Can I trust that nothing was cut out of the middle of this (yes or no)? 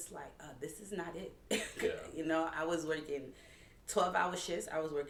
yes